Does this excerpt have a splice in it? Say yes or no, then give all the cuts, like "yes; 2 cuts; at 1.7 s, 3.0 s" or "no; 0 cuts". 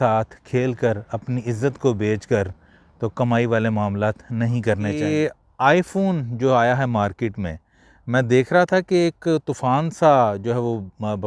yes; 1 cut; at 5.0 s